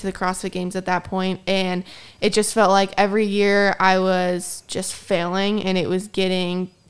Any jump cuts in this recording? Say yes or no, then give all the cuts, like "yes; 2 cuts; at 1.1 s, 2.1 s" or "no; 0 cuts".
no; 0 cuts